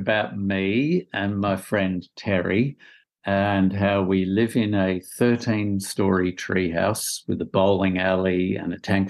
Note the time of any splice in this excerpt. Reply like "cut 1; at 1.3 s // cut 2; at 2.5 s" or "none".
none